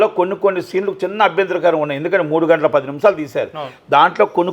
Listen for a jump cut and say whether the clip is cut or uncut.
uncut